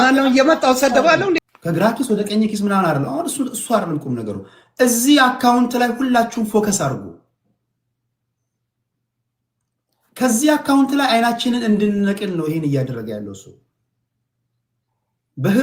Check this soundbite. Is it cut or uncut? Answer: cut